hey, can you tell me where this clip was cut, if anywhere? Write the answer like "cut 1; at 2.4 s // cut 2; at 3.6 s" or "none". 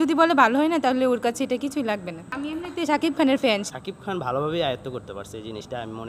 cut 1; at 2.4 s // cut 2; at 3.6 s